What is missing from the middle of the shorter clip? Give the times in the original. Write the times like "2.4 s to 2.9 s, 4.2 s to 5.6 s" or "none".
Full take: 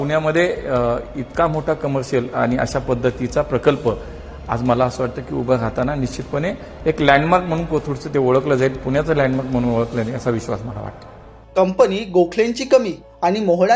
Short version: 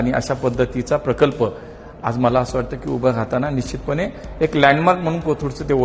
none